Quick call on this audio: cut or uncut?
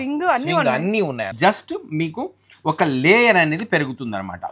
cut